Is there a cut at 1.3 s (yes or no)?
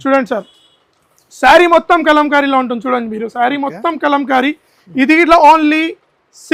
no